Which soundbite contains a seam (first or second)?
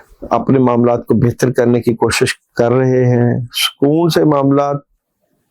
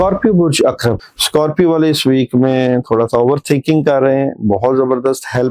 second